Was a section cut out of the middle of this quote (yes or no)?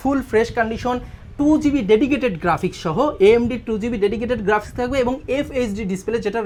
no